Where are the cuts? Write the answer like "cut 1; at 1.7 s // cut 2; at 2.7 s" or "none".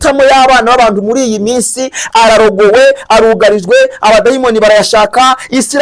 none